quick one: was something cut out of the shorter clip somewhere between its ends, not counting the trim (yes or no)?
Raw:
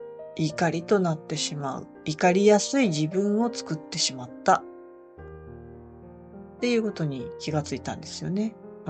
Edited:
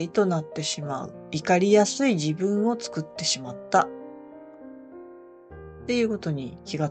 no